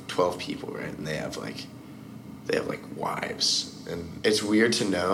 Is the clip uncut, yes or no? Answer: no